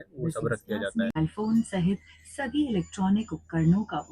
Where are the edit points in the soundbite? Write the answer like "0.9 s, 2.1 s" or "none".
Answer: 1.2 s